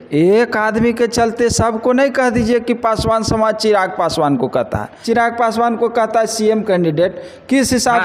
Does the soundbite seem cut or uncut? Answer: cut